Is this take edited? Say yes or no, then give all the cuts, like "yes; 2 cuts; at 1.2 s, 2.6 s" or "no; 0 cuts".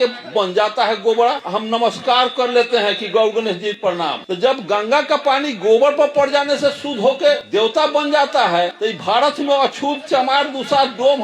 yes; 4 cuts; at 1.5 s, 4.0 s, 7.4 s, 8.8 s